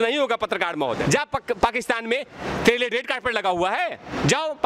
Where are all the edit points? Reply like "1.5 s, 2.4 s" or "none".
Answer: 1.0 s